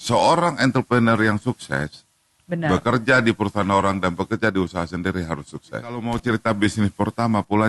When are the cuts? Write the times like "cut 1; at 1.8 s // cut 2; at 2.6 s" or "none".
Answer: cut 1; at 6.0 s